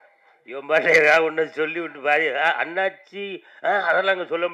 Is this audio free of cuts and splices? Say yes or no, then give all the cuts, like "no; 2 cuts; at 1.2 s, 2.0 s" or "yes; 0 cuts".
yes; 0 cuts